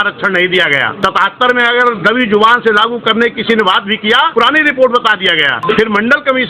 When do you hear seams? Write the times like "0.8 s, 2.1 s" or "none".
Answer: 0.9 s, 4.3 s, 5.5 s